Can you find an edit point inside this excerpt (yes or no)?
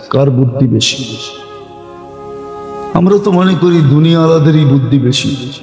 yes